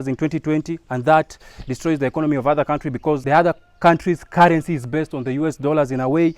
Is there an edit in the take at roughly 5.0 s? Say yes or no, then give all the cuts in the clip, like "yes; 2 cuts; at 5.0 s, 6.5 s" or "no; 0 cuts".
no; 1 cut; at 3.2 s